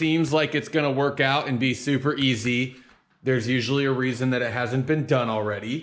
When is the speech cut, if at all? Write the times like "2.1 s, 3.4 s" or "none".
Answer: none